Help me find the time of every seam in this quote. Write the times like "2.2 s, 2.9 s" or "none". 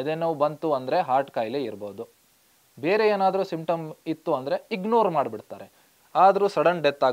5.9 s